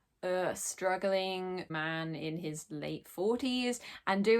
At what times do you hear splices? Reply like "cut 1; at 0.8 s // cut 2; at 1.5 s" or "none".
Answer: cut 1; at 1.7 s